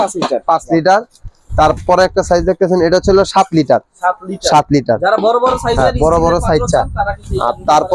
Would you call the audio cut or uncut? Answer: uncut